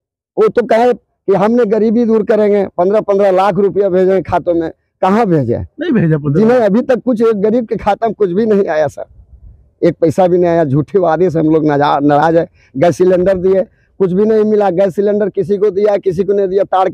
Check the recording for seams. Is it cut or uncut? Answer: uncut